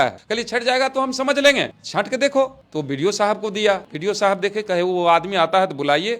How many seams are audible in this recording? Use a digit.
1